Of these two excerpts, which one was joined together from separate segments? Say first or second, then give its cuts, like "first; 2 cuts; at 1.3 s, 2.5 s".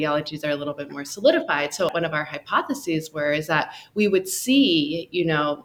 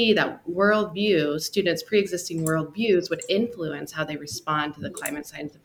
first; 1 cut; at 1.9 s